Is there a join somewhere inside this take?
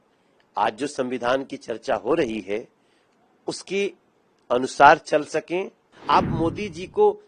yes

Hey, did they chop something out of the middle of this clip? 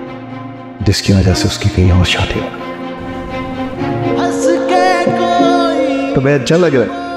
yes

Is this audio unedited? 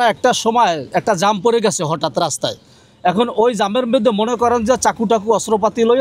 yes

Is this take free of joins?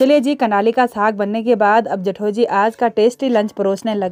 yes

